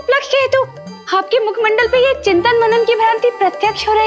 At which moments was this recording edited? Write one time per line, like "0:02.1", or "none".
none